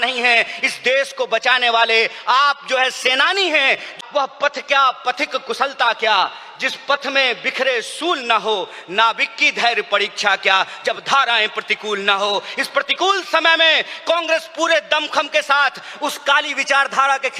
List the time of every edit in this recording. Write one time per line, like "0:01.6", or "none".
0:03.9

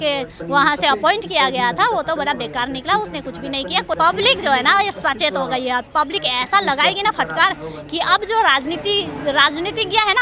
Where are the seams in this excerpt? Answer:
0:04.0

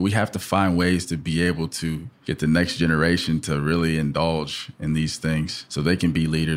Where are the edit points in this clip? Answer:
0:02.1
0:05.6

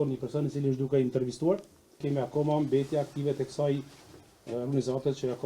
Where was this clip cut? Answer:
0:02.0

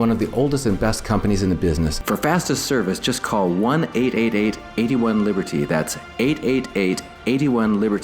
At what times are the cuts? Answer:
0:02.0

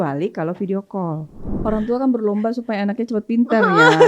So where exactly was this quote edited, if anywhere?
0:01.5

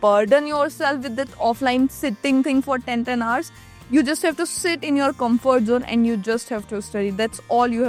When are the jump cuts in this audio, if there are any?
none

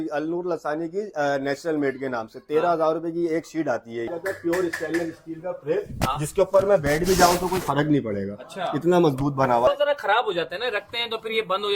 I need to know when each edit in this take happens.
0:04.1
0:09.7

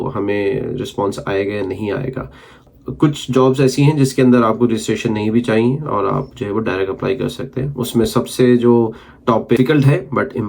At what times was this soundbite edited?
0:02.6
0:09.6

